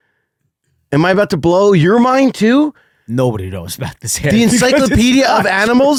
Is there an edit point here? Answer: no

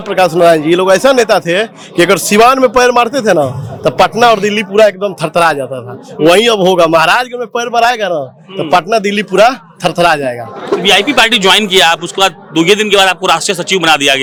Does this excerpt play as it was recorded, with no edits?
yes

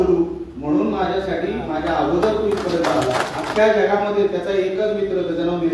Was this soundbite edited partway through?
yes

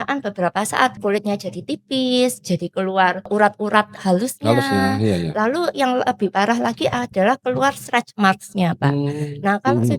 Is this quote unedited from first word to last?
no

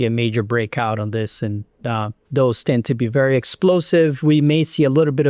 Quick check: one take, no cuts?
yes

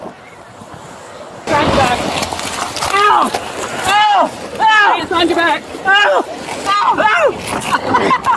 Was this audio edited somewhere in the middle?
yes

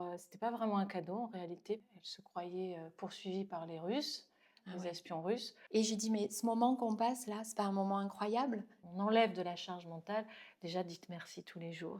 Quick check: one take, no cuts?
no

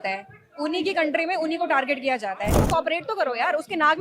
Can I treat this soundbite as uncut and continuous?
no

